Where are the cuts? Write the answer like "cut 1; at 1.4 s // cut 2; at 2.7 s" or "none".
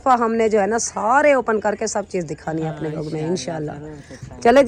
cut 1; at 2.9 s